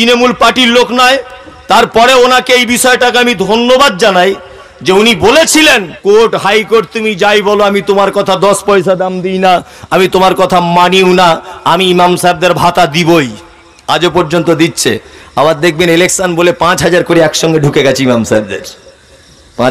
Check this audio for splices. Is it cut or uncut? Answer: cut